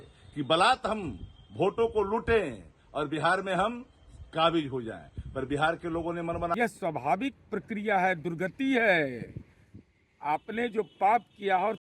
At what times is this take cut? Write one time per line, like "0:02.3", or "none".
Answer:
0:06.5